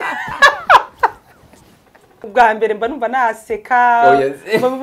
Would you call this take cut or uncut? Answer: cut